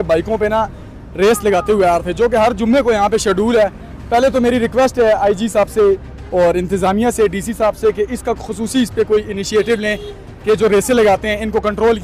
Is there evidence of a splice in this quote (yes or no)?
no